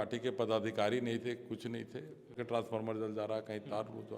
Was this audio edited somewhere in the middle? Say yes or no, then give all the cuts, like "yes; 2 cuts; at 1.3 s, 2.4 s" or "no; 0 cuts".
yes; 1 cut; at 2.3 s